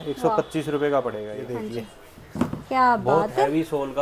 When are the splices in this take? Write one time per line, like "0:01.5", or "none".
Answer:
0:01.3